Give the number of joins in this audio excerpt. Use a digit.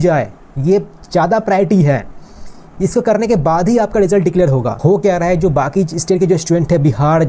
1